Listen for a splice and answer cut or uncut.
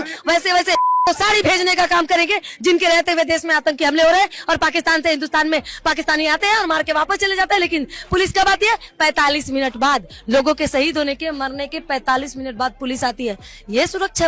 uncut